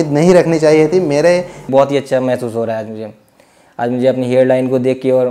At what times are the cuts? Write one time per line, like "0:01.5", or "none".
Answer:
0:01.7